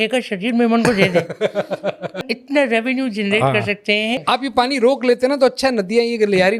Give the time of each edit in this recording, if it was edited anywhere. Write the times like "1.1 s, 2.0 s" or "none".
2.4 s, 4.2 s